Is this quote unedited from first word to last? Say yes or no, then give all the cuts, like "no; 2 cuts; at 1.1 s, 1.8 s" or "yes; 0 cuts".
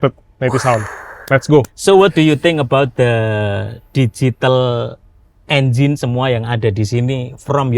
no; 1 cut; at 1.7 s